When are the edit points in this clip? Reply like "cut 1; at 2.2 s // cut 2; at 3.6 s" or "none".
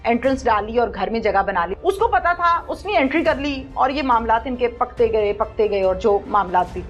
cut 1; at 1.7 s